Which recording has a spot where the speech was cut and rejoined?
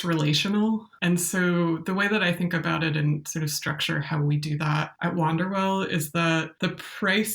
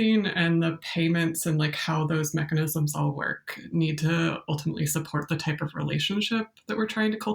first; 3 cuts; at 0.9 s, 4.9 s, 6.5 s

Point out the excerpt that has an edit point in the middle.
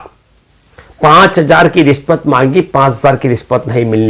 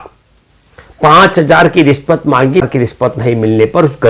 second; 1 cut; at 2.7 s

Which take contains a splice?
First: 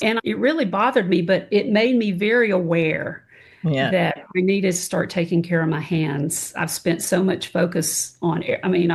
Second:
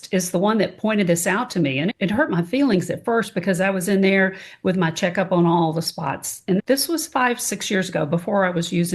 second; 1 cut; at 6.6 s

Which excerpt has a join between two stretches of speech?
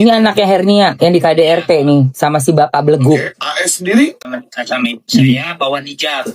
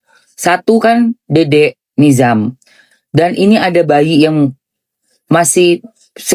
first; 1 cut; at 4.2 s

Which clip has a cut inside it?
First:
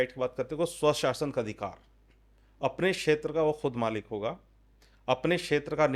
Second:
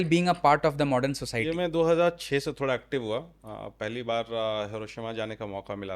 second; 1 cut; at 1.4 s

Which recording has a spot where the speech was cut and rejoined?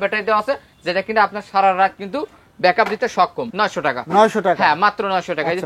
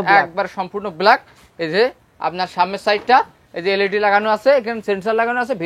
first; 1 cut; at 3.4 s

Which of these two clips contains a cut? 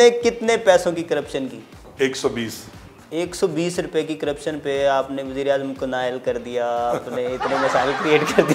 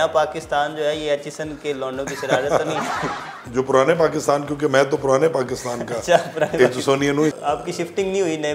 second; 2 cuts; at 3.4 s, 7.4 s

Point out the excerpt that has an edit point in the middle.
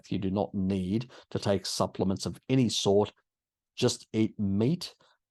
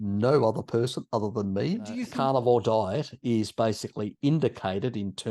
second; 1 cut; at 2.0 s

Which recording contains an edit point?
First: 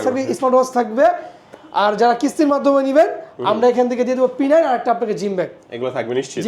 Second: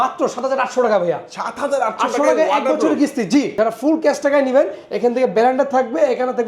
second; 1 cut; at 3.5 s

